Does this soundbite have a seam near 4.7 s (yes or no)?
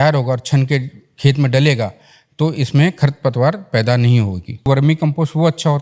yes